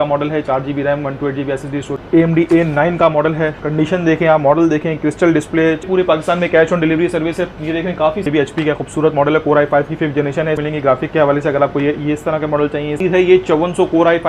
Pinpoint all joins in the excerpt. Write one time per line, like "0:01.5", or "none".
0:01.9
0:05.8
0:08.3
0:10.6
0:13.0